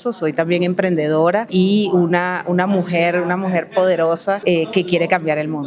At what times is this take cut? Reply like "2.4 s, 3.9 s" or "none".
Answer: 1.5 s, 4.4 s

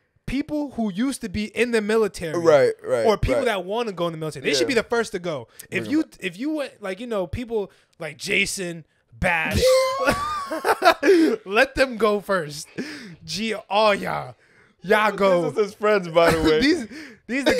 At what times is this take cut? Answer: none

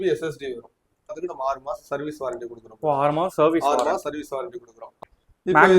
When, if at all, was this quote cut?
1.2 s, 5.0 s

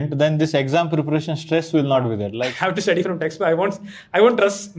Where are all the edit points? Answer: 2.4 s

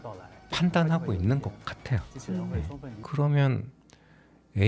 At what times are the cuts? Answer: 3.0 s

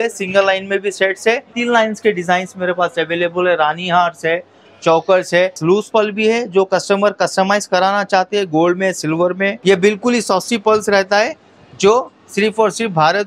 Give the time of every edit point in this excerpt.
1.5 s, 5.6 s, 9.6 s

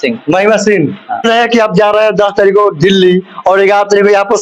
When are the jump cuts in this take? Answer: 1.2 s

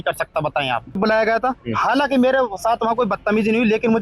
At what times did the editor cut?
1.0 s

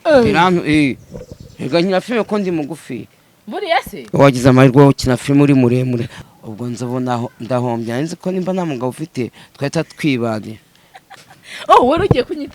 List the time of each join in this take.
6.1 s

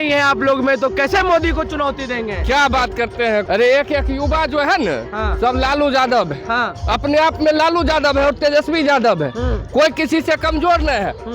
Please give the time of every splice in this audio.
3.5 s

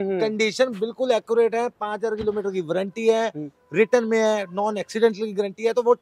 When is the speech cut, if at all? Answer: none

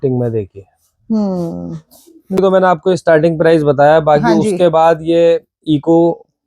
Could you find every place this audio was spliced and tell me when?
2.4 s

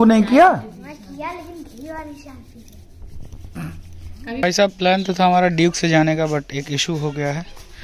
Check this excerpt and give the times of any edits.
4.4 s

